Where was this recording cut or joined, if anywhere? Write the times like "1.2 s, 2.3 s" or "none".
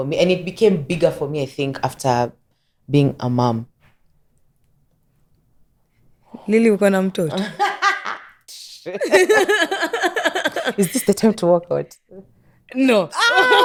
none